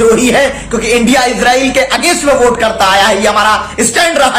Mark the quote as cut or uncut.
uncut